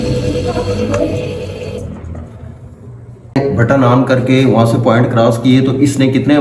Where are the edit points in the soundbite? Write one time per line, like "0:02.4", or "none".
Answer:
0:03.4